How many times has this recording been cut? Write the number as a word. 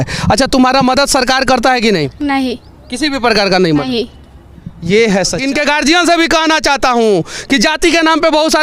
one